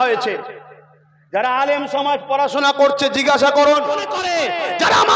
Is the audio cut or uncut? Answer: cut